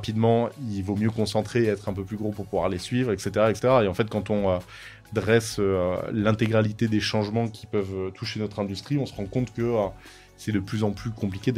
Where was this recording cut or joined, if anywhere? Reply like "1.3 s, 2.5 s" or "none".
none